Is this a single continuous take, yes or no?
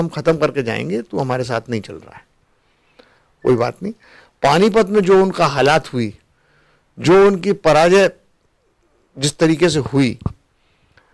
yes